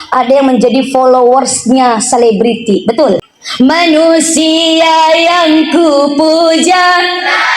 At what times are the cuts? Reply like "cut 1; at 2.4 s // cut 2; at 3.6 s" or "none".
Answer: cut 1; at 3.4 s